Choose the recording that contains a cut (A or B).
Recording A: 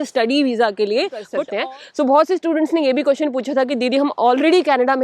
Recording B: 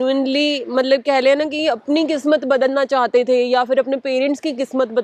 A